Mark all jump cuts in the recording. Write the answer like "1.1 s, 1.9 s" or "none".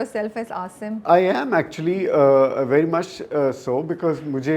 none